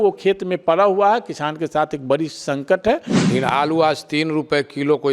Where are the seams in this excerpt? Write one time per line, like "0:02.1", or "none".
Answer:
0:03.1